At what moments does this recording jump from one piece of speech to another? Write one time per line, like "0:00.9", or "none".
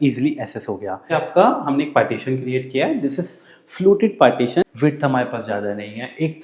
0:01.1
0:04.6